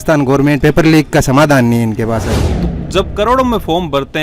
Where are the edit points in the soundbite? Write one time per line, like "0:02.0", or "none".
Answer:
0:02.4